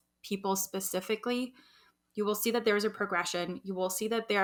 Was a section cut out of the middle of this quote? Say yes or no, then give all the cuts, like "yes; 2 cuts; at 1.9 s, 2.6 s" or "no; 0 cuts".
no; 0 cuts